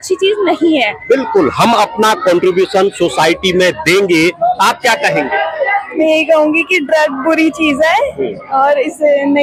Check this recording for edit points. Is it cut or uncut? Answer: uncut